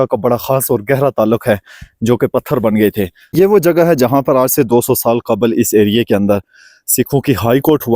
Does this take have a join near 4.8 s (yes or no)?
no